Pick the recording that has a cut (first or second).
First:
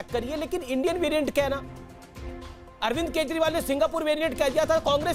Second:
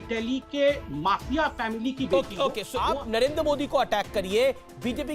second